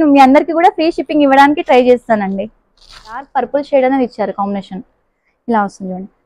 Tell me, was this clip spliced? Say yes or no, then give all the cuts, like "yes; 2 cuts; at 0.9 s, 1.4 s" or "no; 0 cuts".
yes; 1 cut; at 3.3 s